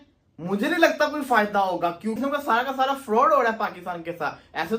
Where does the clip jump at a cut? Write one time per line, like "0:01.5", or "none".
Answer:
0:02.2